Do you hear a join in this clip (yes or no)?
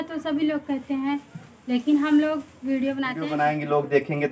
yes